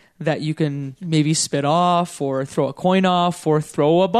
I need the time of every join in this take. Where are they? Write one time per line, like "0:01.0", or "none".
0:00.9